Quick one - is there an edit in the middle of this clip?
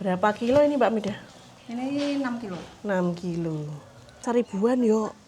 yes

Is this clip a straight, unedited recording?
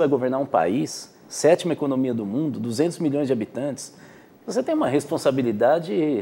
yes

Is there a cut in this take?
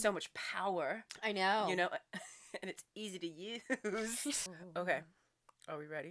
yes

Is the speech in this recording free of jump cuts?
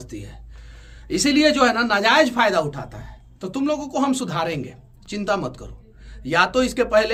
yes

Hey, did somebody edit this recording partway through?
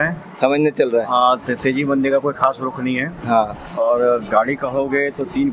no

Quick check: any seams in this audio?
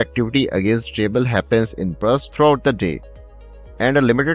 no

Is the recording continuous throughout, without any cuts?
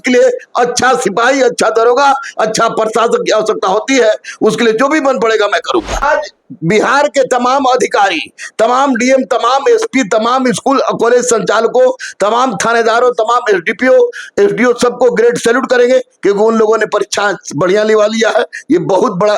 no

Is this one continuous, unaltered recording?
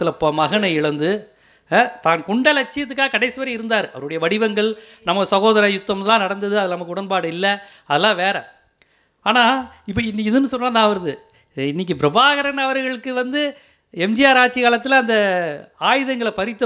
yes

